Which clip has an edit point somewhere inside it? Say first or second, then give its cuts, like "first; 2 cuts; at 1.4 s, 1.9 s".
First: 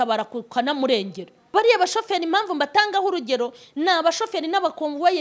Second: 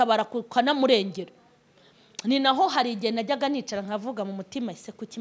first; 1 cut; at 1.3 s